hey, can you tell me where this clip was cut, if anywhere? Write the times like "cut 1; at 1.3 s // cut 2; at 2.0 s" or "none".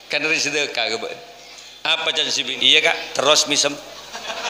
cut 1; at 2.6 s